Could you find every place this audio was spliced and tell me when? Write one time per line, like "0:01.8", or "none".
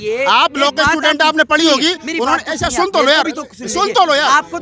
none